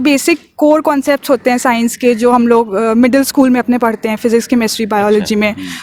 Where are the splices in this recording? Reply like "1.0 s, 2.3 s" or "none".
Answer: none